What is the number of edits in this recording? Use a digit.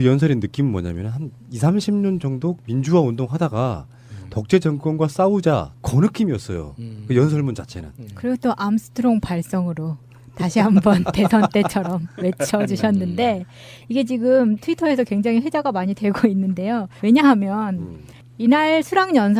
0